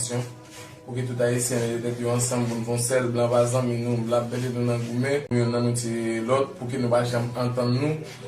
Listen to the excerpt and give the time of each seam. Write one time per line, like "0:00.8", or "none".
0:05.3